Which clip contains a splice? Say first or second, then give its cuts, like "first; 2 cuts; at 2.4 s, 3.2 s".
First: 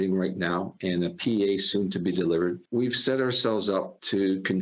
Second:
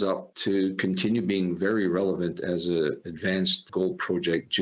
second; 1 cut; at 3.7 s